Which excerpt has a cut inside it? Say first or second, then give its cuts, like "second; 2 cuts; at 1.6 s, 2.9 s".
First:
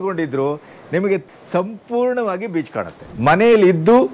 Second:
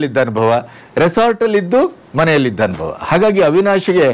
first; 1 cut; at 3.1 s